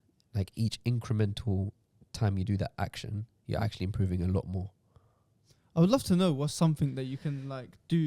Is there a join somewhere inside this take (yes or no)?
no